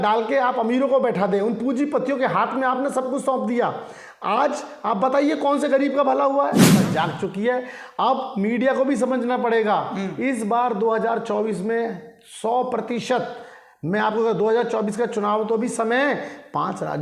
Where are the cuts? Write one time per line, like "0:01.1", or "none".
0:06.8